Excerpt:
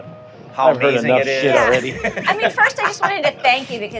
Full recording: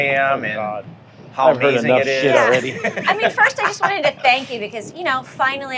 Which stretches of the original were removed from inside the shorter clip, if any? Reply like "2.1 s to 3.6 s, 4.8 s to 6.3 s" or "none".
none